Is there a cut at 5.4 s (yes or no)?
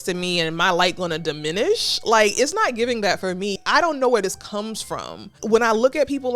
yes